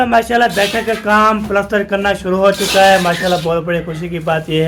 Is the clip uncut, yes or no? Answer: yes